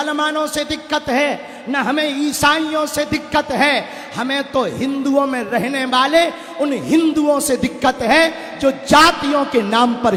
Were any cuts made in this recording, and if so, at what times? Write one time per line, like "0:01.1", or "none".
none